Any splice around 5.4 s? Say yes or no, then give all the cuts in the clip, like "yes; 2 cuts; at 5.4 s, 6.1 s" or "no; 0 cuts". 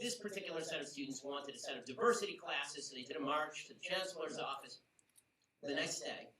no; 1 cut; at 3.8 s